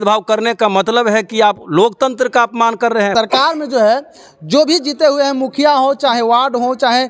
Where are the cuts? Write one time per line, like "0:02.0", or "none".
0:03.1